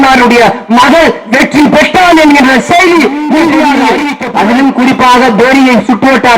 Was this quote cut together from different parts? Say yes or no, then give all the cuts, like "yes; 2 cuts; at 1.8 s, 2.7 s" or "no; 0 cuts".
yes; 1 cut; at 4.2 s